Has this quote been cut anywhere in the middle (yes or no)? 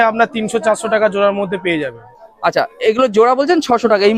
no